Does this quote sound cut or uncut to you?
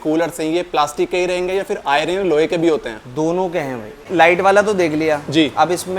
cut